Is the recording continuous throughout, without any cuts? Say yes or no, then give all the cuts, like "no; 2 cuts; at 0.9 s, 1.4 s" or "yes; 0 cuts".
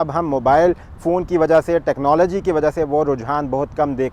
yes; 0 cuts